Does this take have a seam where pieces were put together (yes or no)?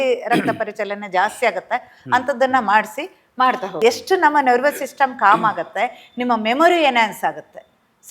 yes